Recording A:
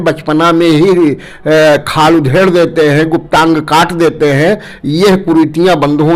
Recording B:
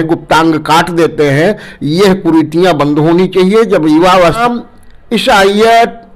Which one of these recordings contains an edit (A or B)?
B